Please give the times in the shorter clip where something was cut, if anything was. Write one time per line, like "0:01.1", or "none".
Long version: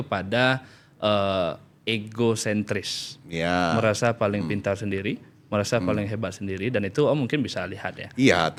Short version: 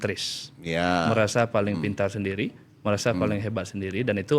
none

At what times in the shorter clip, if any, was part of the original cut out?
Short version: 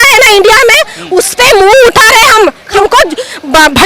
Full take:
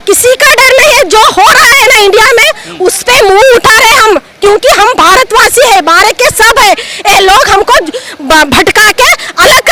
0:02.8

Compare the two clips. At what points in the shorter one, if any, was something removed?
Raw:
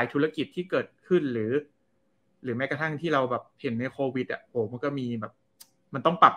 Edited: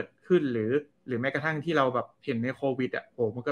0:01.0

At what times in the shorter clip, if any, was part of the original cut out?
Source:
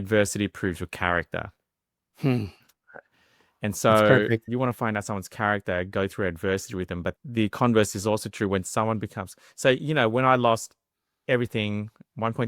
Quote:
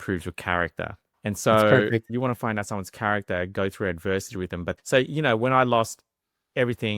0:01.0
0:04.8

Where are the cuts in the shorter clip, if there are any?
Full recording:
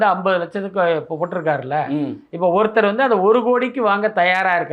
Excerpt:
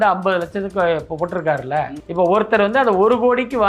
0:01.9

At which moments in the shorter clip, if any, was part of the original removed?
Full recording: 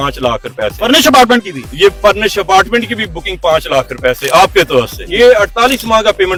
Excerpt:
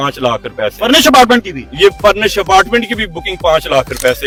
none

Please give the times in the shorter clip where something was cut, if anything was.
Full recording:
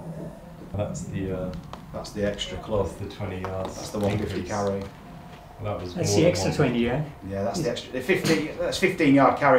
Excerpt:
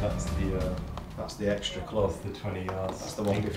none

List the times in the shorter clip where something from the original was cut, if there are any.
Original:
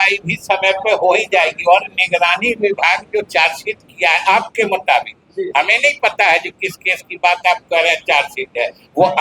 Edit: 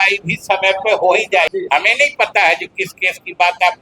0:01.5

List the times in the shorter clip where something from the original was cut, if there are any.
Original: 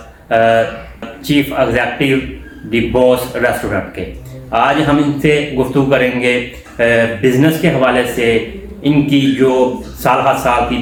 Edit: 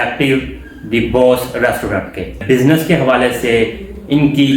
0:02.4

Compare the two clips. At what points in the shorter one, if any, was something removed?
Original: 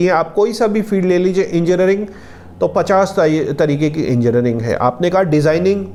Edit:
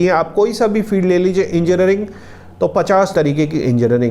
0:03.1

